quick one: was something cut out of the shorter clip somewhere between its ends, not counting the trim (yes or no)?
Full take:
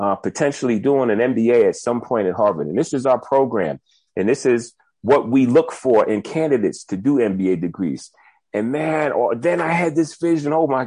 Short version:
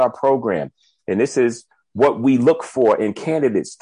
no